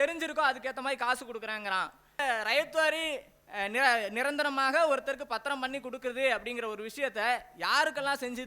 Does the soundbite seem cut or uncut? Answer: cut